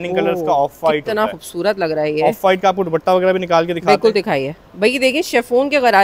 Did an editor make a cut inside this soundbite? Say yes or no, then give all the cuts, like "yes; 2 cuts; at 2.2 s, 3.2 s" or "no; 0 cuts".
no; 0 cuts